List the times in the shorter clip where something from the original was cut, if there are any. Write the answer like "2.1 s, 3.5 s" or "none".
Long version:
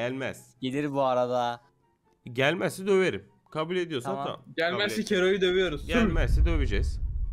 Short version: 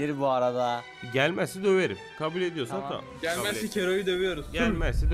0.9 s, 2.1 s